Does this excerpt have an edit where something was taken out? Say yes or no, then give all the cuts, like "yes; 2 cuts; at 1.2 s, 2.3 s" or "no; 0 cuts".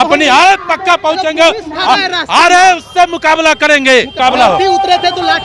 yes; 1 cut; at 4.1 s